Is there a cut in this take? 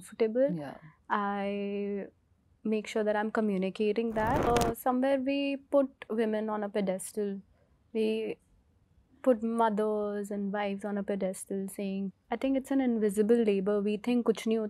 yes; 2 cuts; at 4.5 s, 12.1 s

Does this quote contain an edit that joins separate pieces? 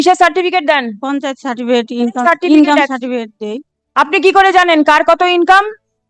no; 0 cuts

